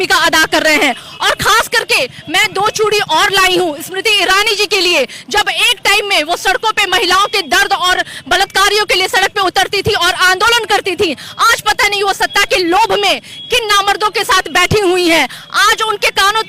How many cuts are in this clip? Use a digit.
0